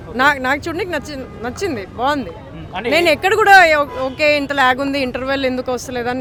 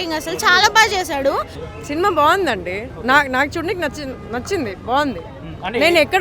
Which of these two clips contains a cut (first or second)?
second